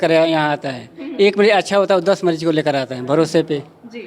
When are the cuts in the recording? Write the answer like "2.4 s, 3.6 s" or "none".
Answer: none